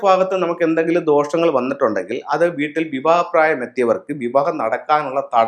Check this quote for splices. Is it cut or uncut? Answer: uncut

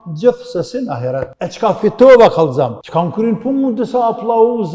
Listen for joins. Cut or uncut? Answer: cut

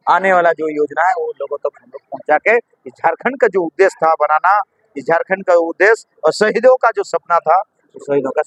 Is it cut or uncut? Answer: uncut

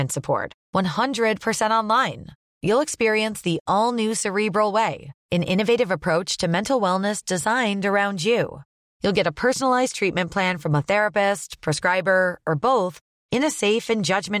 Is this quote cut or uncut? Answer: uncut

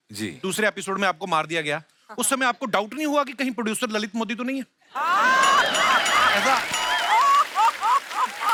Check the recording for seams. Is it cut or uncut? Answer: uncut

